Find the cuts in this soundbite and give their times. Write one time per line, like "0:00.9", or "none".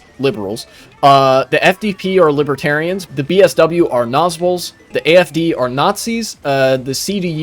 0:03.0
0:04.9